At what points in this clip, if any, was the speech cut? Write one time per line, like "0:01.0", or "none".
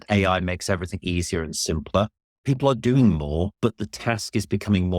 0:02.3
0:03.5